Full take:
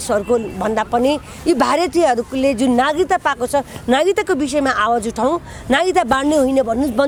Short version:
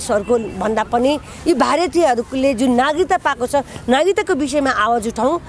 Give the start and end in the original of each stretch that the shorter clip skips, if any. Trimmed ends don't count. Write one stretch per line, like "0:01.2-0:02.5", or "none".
none

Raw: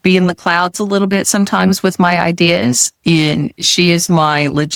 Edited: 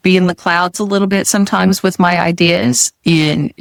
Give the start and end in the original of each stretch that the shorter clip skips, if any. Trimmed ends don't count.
none

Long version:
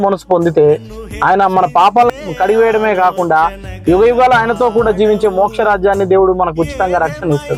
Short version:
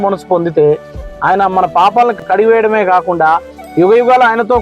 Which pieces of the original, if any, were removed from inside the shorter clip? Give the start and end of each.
0:02.2-0:02.3

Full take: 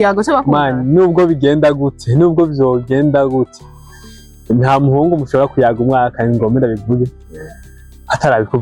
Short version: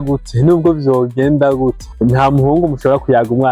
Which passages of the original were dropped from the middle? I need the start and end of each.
0:03.6-0:04.3

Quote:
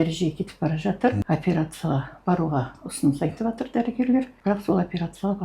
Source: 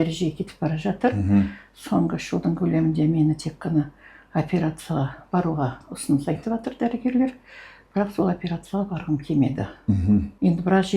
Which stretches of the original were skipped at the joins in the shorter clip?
0:01.2-0:04.3
0:07.4-0:07.8

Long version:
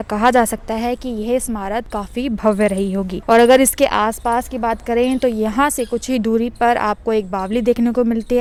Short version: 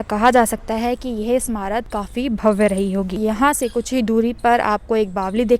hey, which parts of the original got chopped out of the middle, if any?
0:03.2-0:05.4

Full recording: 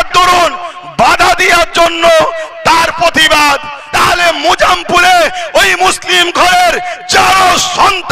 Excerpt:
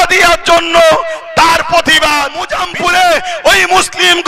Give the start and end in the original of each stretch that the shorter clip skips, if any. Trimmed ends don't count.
0:03.8-0:04.6

